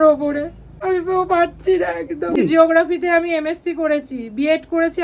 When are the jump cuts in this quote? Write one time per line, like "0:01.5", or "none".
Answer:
0:02.4